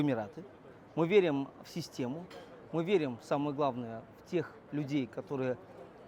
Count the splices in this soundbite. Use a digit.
0